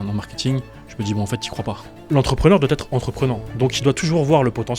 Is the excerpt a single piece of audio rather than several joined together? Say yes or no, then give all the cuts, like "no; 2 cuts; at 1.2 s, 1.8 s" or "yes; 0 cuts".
no; 2 cuts; at 1.9 s, 3.5 s